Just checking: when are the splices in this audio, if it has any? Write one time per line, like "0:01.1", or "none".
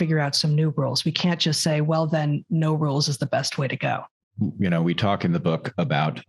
0:04.1